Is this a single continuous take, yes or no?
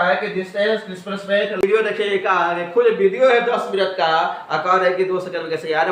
no